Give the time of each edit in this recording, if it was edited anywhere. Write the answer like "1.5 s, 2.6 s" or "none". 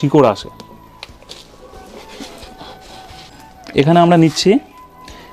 3.2 s